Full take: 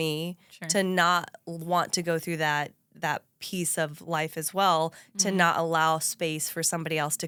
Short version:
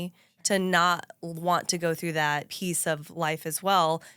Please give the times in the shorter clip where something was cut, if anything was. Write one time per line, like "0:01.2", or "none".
0:02.5